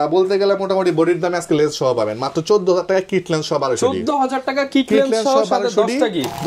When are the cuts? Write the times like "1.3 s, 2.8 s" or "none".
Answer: none

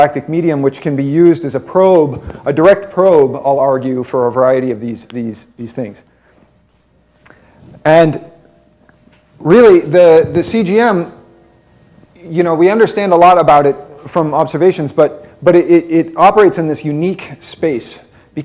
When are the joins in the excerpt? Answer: 7.7 s

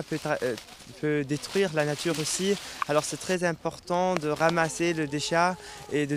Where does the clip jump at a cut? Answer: 2.3 s

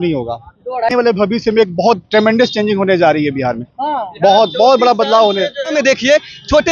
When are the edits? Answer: 0.9 s, 5.7 s

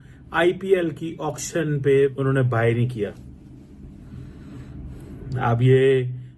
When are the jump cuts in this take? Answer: 2.1 s

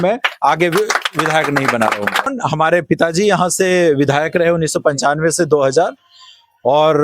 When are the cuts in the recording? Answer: 2.3 s

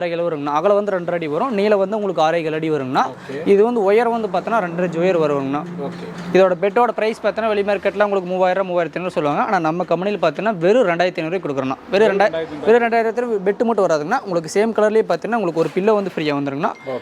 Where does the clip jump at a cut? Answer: none

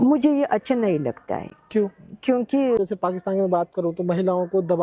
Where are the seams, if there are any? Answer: 2.8 s

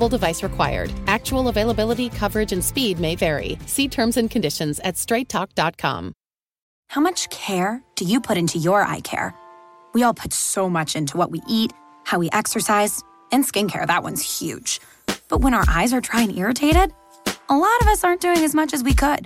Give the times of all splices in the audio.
6.7 s

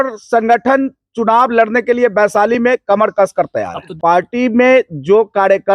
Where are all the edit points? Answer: 3.8 s

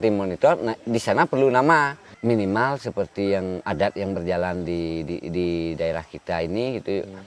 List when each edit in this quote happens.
2.0 s

